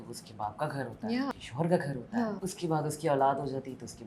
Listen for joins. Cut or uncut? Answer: cut